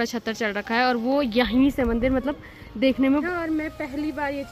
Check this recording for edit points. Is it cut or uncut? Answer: cut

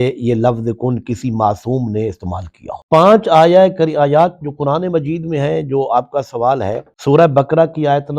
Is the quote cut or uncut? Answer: cut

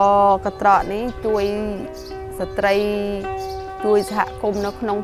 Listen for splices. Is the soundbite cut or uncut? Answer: uncut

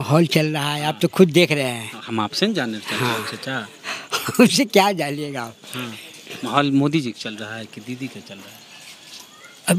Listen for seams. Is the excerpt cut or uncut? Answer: uncut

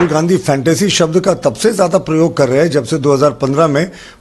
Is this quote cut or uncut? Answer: uncut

